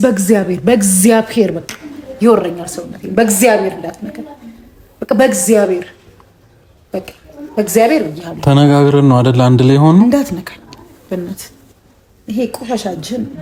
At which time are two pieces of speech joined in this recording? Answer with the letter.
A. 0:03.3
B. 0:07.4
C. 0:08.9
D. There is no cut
D